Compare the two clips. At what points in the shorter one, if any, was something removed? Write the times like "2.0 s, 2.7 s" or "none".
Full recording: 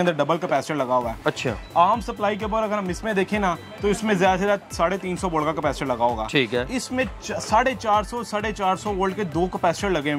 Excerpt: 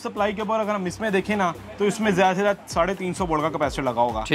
none